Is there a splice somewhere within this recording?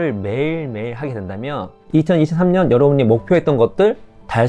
yes; 1 cut; at 1.8 s

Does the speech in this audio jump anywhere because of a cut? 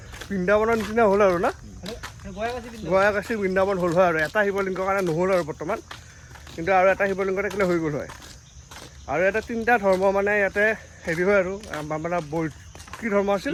no; 0 cuts

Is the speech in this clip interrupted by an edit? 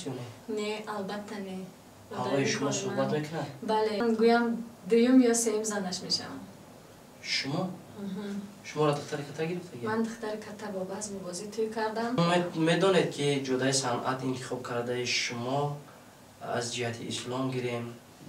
yes; 2 cuts; at 4.0 s, 12.2 s

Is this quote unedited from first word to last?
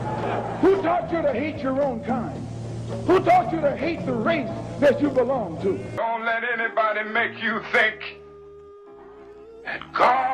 no; 1 cut; at 5.9 s

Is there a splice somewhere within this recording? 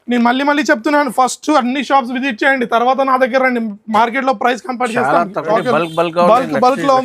yes; 1 cut; at 5.5 s

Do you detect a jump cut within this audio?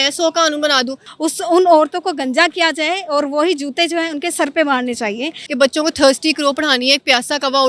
yes; 2 cuts; at 1.0 s, 5.4 s

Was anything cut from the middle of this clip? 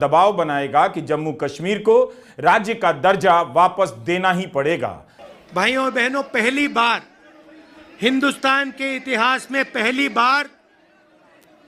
no; 0 cuts

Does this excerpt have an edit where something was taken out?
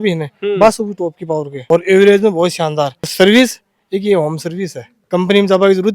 yes; 2 cuts; at 3.1 s, 5.0 s

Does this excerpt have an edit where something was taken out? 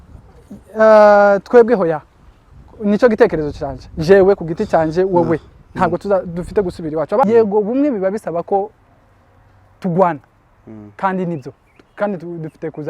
yes; 1 cut; at 7.2 s

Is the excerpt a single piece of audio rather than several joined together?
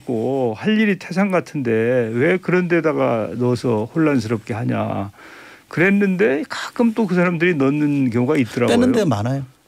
yes; 0 cuts

